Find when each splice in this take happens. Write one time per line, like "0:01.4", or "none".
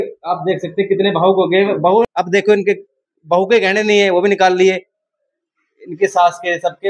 0:02.1